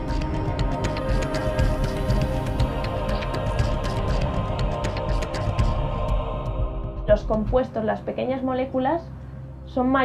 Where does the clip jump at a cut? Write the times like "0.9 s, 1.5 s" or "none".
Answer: 1.4 s